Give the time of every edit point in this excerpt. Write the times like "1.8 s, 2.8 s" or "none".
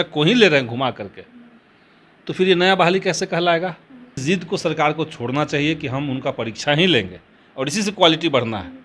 4.2 s